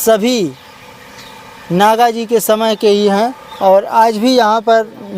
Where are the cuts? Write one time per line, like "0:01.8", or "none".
none